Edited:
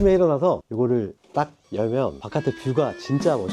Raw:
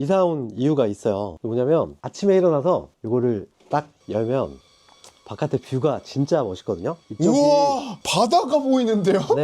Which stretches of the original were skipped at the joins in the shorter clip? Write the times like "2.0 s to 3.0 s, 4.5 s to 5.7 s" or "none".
3.1 s to 3.3 s, 4.6 s to 5.3 s